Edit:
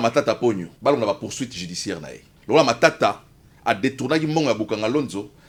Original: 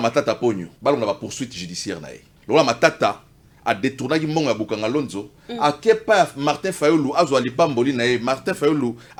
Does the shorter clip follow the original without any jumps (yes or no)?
yes